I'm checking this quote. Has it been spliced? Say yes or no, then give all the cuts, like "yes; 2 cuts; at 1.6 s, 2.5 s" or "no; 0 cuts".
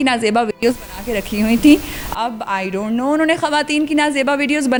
no; 0 cuts